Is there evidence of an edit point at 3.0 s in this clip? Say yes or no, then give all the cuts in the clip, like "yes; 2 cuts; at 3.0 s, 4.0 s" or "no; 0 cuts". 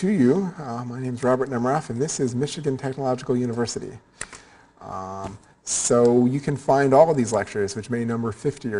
yes; 1 cut; at 3.0 s